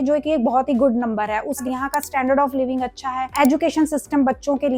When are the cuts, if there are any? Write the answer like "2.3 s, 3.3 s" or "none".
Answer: 1.6 s